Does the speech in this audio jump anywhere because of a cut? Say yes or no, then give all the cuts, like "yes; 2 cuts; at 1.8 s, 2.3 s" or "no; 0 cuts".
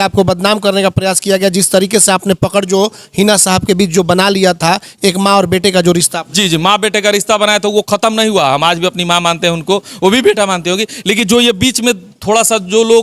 no; 0 cuts